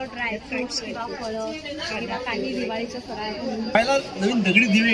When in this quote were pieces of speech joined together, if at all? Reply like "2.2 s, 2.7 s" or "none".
3.8 s